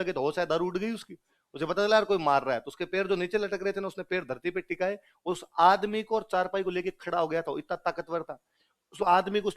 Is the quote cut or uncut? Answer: uncut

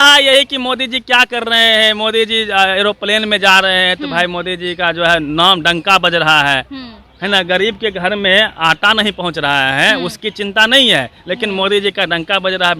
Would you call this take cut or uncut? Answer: uncut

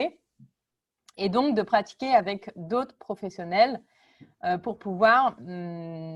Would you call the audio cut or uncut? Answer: uncut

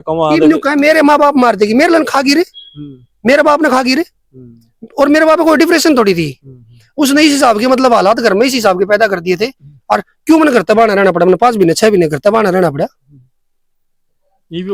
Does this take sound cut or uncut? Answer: uncut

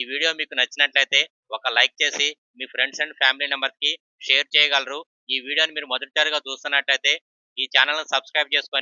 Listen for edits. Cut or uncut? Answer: uncut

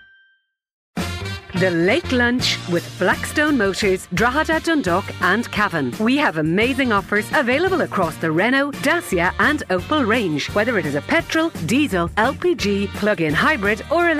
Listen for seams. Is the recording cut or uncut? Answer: cut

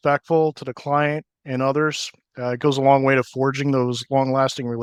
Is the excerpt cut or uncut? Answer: uncut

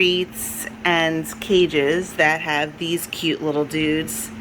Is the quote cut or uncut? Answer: uncut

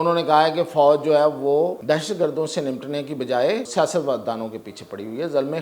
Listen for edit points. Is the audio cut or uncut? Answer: cut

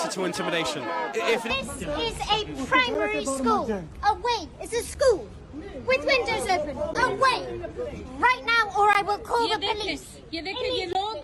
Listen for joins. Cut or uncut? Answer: cut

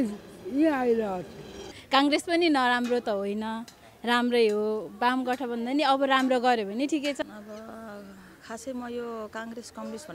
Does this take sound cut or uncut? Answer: cut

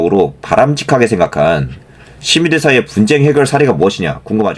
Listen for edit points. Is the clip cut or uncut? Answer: uncut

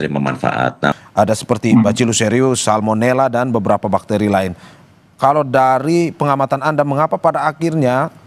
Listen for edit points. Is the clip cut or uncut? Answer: cut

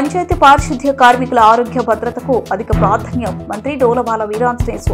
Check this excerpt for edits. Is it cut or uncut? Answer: uncut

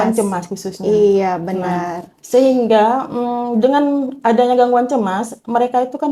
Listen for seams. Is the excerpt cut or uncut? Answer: uncut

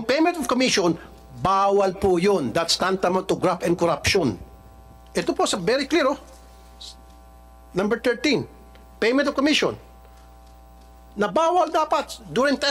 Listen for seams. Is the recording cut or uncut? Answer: uncut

